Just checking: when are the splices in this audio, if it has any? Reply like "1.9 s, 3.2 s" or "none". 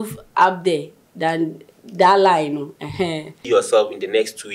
3.3 s